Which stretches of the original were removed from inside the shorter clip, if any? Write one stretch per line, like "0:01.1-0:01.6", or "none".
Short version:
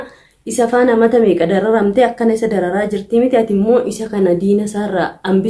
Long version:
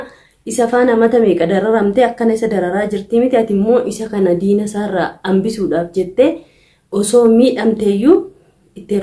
none